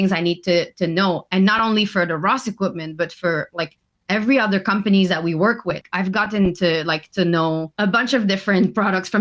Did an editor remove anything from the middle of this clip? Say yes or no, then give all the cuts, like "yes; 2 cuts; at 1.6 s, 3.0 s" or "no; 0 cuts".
yes; 2 cuts; at 5.8 s, 7.7 s